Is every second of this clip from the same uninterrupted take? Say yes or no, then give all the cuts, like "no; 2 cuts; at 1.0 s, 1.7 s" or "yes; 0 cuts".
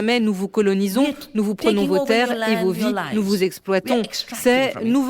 yes; 0 cuts